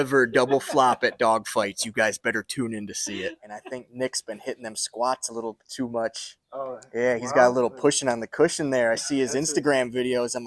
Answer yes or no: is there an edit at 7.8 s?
no